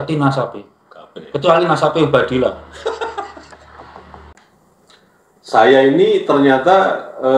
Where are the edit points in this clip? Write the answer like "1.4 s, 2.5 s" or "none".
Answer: 4.3 s